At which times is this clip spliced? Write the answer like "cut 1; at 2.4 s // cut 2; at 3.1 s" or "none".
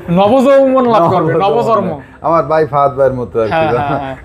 none

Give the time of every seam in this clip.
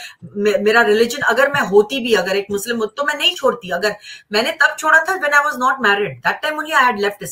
none

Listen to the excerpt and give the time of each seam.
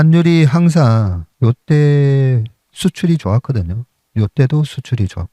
cut 1; at 1.2 s

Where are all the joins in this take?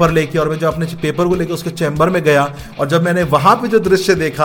none

